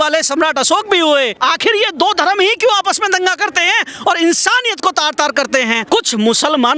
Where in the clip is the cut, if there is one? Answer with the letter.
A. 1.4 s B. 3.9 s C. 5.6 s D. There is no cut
A